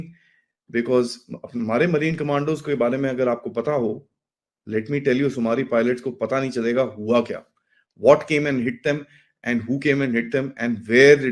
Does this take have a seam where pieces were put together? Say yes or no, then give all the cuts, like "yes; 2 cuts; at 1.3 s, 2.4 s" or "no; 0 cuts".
no; 0 cuts